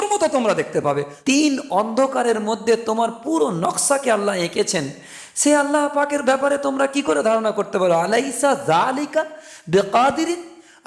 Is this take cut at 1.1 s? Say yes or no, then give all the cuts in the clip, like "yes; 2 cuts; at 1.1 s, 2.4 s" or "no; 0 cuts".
yes; 1 cut; at 1.1 s